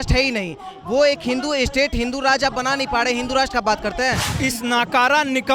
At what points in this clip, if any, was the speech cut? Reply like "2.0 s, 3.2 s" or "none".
4.3 s